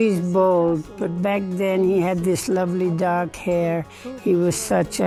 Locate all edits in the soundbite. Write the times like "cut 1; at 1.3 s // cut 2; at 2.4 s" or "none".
none